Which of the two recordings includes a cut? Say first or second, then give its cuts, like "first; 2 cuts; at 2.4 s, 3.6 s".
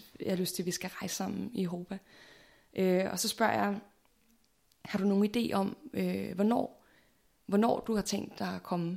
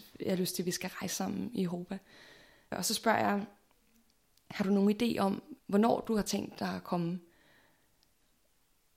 second; 2 cuts; at 2.7 s, 5.5 s